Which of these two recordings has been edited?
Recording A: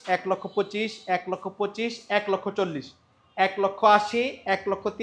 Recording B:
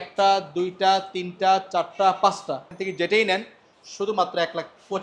B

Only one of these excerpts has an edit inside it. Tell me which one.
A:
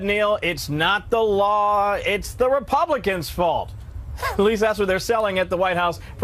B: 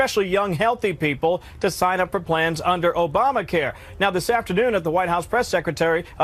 B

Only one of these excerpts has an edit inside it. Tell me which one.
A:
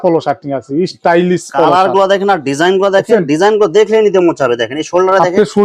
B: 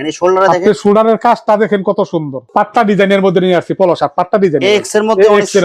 B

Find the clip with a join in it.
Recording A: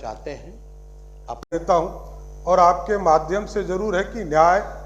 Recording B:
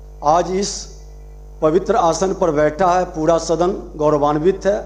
A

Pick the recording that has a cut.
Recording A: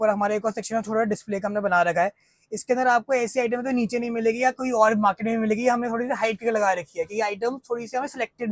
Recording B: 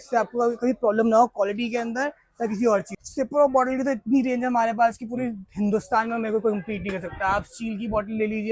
B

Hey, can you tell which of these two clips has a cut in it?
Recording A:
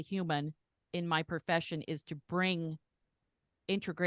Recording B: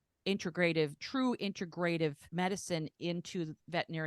B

